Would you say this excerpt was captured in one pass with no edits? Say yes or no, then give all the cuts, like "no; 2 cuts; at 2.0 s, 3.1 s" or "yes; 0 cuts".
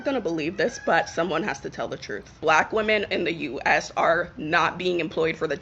no; 1 cut; at 3.2 s